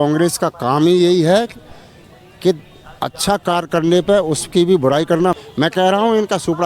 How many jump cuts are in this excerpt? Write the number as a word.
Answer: one